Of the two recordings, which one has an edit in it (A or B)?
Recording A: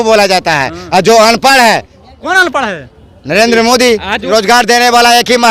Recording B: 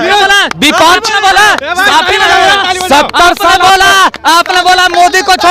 A